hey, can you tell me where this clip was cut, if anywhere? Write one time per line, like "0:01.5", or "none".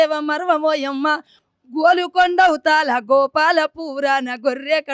0:01.3